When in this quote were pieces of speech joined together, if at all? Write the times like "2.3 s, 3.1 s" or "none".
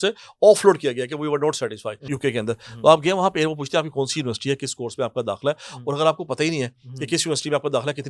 2.1 s